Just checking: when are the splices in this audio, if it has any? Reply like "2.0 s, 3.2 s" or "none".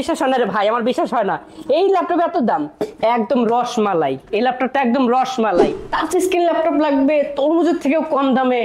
5.8 s